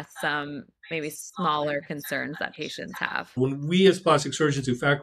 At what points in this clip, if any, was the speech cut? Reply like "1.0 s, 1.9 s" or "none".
3.3 s